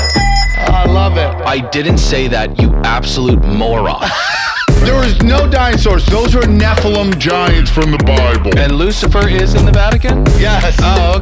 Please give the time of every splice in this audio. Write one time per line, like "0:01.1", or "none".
none